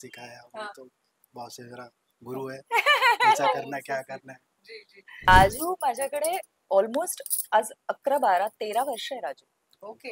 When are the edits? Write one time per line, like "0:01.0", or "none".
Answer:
0:05.3